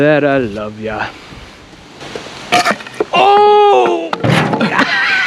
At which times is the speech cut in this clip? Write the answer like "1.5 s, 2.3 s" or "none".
2.0 s